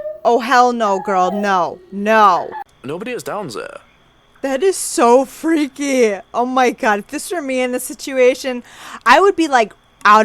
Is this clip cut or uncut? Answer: cut